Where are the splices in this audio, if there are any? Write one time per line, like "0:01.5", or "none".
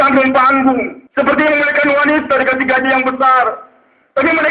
0:01.0

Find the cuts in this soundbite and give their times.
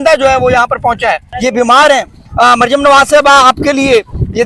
0:01.3

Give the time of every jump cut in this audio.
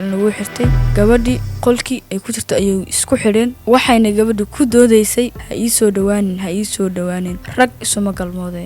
0:03.6
0:05.4

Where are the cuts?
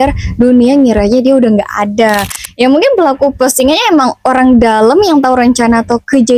0:02.4

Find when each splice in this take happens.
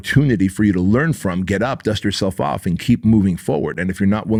none

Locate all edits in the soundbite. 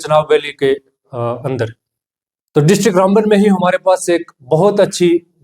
none

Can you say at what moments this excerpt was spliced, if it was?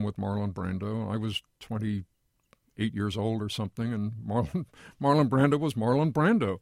none

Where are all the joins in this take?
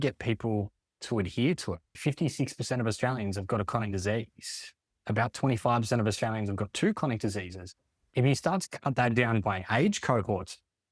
0:01.9

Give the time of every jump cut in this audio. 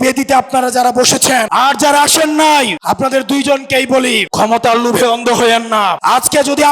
0:01.5
0:02.8
0:04.3
0:06.0

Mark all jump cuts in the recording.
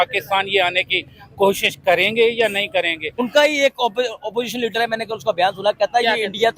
0:03.1

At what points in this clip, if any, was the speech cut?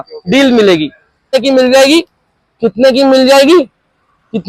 0:01.2

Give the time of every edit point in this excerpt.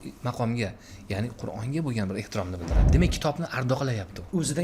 0:02.9

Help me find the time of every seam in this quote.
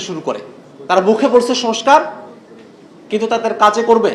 0:01.1

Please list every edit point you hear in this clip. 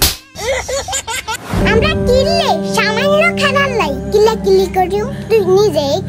0:01.6

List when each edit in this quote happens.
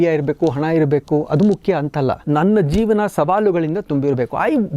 0:02.2

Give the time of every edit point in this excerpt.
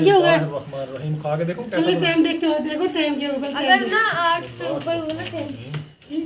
none

